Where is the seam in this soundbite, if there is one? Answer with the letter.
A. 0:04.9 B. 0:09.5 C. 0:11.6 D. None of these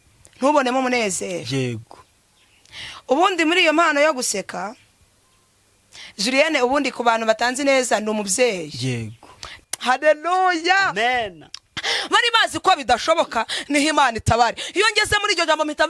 B